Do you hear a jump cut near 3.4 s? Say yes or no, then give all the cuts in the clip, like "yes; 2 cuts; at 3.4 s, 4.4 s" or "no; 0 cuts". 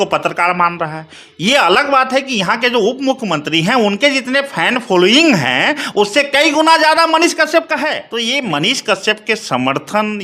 no; 1 cut; at 8.1 s